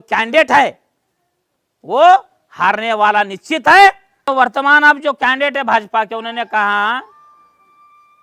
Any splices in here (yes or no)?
yes